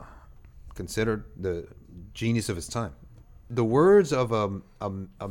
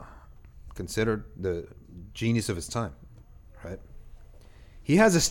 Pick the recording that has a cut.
first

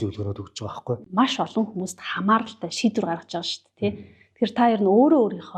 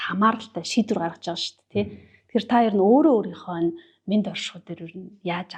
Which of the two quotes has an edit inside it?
first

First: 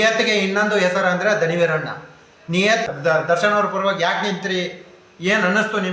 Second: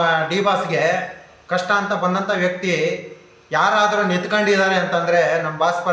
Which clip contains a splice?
first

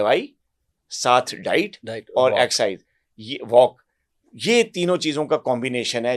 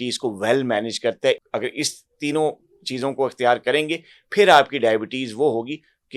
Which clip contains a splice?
second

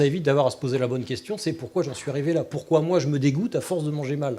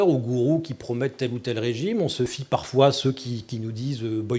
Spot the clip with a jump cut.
second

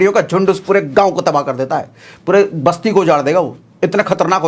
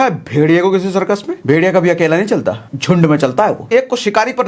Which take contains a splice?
second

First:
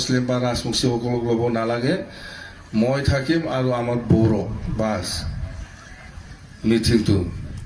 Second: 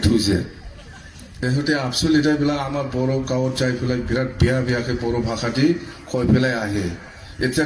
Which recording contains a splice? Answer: second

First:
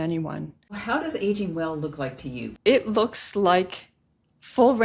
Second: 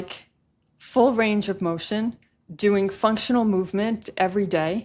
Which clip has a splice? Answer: first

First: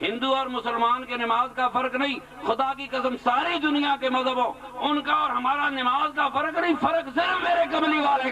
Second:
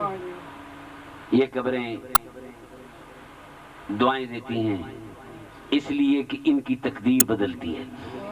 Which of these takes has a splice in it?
second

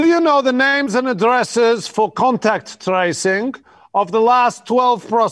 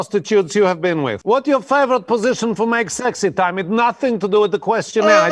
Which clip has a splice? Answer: second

